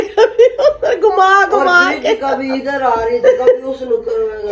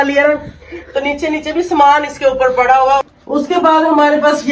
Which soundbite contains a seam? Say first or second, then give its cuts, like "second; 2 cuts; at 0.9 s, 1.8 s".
second; 1 cut; at 3.0 s